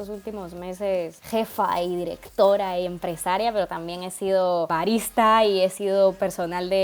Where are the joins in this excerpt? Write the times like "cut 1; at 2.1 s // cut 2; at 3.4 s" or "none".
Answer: cut 1; at 1.2 s // cut 2; at 4.7 s